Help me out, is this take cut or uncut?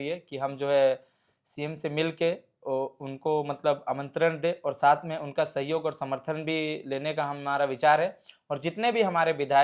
uncut